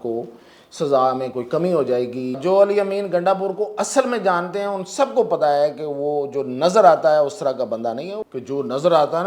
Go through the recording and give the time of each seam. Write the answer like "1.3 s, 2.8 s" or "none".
2.4 s, 8.2 s